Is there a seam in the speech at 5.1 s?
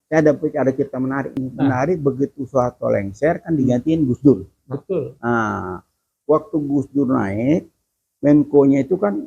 no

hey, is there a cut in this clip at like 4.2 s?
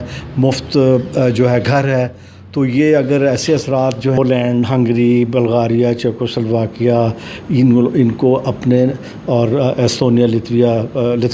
yes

